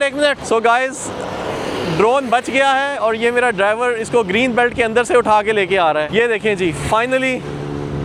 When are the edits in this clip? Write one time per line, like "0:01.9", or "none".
none